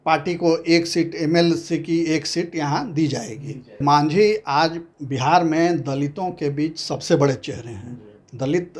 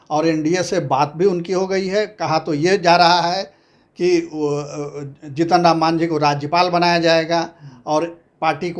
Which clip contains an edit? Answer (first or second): first